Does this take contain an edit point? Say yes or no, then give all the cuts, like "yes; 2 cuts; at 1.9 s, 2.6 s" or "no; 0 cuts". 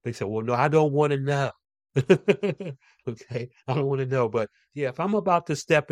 no; 0 cuts